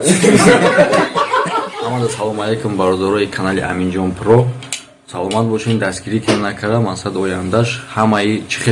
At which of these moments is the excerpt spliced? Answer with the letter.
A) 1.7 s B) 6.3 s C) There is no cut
A